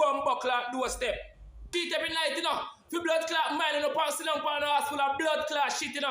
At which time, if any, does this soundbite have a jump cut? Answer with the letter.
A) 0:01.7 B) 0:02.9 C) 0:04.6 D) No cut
A